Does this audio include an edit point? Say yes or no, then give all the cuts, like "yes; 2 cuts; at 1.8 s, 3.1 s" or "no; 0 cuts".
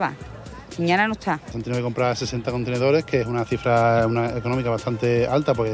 yes; 1 cut; at 1.5 s